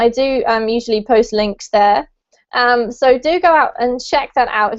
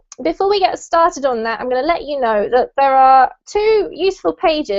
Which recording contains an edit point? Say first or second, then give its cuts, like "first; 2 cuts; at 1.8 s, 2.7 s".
second; 1 cut; at 1.6 s